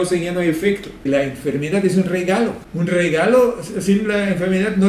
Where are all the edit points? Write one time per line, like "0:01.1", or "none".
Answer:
0:01.1
0:02.6